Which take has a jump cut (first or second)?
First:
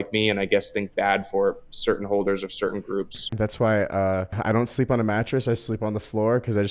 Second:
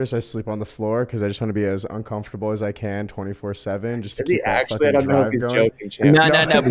first